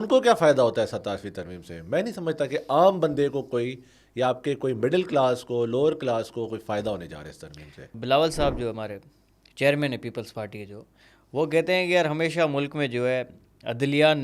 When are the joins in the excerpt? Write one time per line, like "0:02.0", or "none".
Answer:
0:07.7